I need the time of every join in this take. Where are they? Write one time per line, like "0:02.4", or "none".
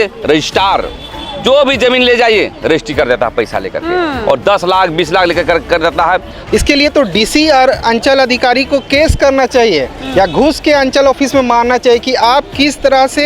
0:06.3